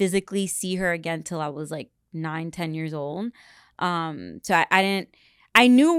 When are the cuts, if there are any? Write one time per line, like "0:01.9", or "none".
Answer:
none